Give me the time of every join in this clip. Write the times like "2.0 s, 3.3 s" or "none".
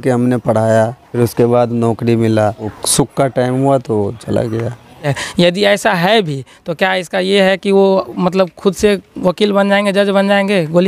1.0 s, 2.8 s, 5.2 s